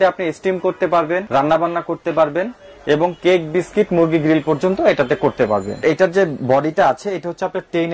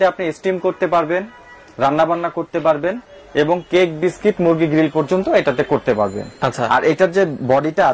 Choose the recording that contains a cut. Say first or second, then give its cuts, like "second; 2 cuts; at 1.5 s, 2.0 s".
first; 2 cuts; at 1.2 s, 5.8 s